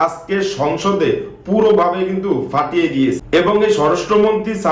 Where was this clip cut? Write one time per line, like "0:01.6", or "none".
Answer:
0:03.2